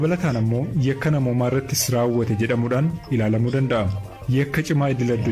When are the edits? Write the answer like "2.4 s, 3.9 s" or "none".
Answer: none